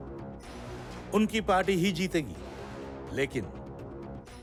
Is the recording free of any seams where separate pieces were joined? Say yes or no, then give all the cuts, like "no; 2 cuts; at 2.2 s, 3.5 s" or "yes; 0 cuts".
yes; 0 cuts